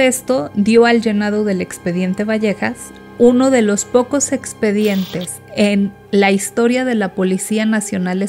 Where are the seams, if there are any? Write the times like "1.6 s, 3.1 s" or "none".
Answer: none